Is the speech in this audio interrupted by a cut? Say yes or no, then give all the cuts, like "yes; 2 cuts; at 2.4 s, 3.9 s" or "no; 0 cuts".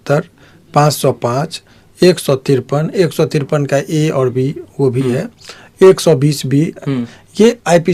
no; 0 cuts